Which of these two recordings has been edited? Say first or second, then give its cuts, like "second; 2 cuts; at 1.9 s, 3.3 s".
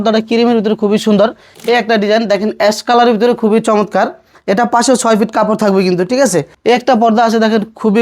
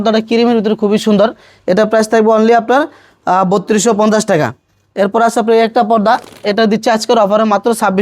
first; 2 cuts; at 1.5 s, 6.5 s